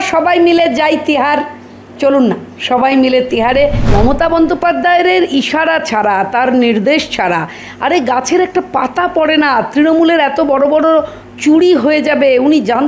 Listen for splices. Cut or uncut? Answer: cut